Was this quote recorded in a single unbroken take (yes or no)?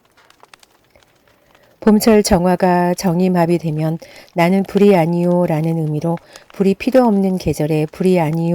no